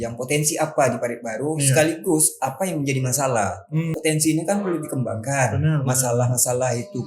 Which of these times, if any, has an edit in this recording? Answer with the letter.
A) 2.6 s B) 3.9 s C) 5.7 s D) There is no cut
B